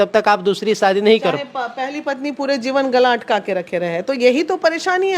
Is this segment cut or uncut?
uncut